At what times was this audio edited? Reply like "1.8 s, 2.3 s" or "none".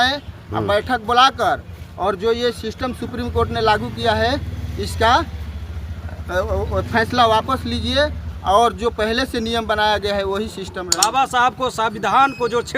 10.9 s